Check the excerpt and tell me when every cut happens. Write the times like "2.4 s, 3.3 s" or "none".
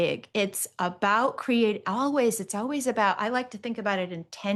none